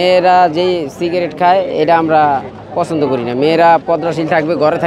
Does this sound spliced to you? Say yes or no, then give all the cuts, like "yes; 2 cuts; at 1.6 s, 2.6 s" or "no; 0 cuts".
no; 0 cuts